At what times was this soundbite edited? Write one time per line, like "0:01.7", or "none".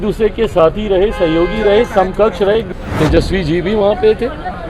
0:02.7